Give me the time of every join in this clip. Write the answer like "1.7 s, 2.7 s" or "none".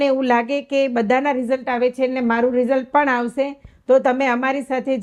none